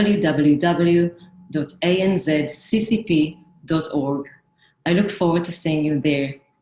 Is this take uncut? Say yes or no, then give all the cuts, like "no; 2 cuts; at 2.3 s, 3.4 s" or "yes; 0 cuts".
yes; 0 cuts